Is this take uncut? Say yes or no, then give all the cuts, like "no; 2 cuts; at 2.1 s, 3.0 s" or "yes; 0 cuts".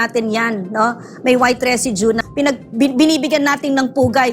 no; 1 cut; at 2.2 s